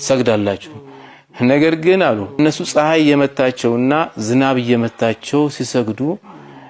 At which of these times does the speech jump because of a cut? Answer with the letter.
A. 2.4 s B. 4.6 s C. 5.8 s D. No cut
A